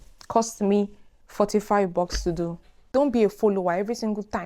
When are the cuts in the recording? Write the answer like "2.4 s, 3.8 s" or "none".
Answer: 2.9 s